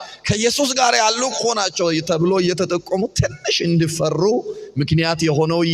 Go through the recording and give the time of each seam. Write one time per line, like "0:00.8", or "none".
none